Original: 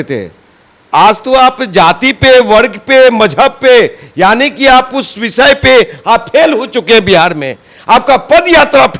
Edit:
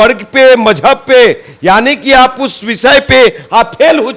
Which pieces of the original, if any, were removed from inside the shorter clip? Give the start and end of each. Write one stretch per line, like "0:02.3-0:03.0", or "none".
none